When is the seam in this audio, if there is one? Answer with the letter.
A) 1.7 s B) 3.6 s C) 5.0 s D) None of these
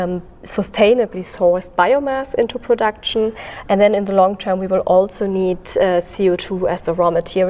D